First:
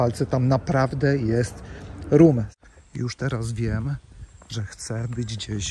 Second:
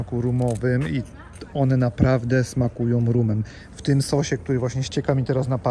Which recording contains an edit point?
first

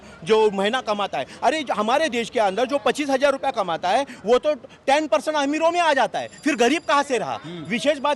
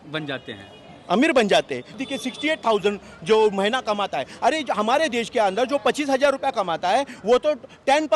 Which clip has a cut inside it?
second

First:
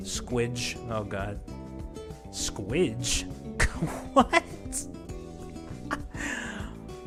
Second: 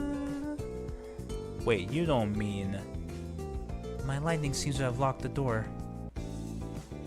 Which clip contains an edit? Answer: second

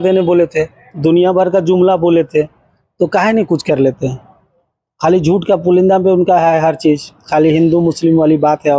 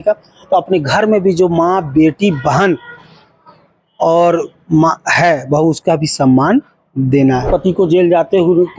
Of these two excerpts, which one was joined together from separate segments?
second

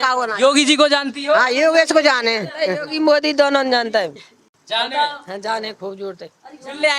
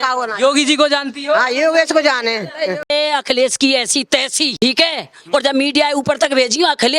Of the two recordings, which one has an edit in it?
second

